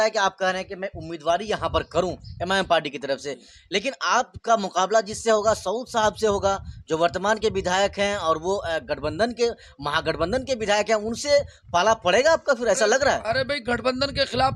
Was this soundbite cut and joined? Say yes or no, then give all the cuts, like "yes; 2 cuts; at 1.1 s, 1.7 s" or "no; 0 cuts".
no; 0 cuts